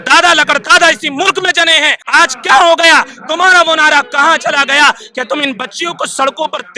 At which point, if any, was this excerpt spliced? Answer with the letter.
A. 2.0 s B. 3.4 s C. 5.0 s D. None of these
A